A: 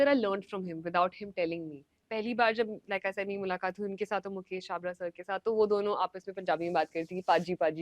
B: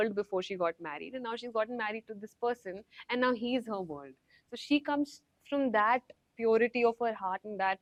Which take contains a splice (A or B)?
A